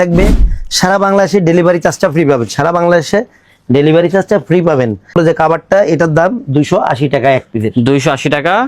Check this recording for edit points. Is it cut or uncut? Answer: cut